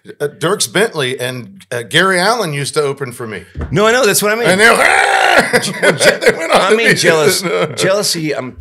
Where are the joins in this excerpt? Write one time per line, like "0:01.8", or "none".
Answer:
none